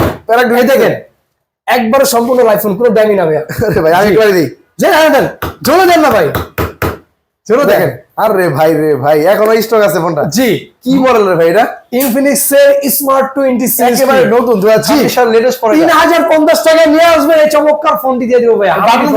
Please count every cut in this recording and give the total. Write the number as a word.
zero